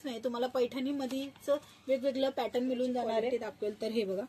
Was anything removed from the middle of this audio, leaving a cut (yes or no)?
yes